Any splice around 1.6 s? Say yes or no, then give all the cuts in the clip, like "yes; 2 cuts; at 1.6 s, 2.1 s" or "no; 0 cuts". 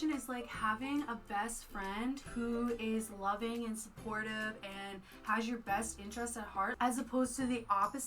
no; 1 cut; at 6.7 s